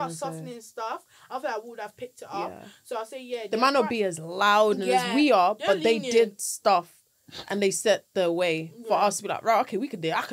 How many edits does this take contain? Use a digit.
0